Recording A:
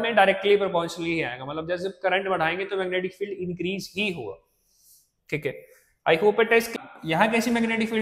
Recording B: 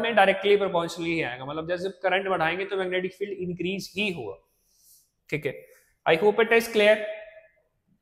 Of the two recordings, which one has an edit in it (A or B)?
A